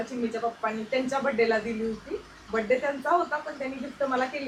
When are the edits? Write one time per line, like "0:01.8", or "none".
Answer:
none